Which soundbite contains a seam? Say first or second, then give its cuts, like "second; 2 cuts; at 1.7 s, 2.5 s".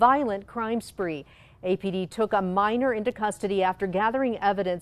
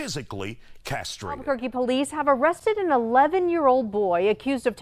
second; 1 cut; at 1.3 s